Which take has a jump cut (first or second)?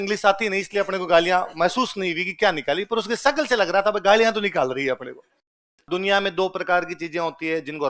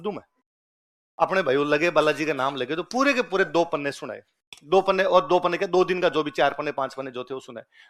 first